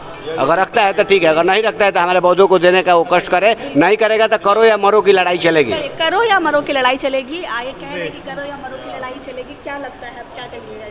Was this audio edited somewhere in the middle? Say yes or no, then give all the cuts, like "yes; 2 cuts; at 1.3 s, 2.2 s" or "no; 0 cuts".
no; 0 cuts